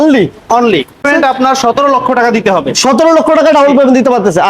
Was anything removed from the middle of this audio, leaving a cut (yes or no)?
yes